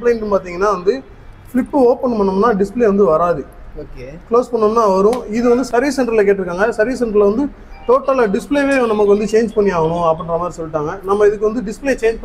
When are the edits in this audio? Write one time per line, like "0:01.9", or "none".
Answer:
none